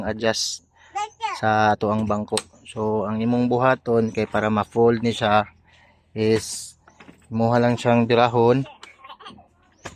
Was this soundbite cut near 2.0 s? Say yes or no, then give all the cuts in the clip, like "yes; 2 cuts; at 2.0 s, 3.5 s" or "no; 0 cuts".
no; 0 cuts